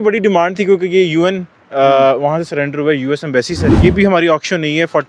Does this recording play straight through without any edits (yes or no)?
no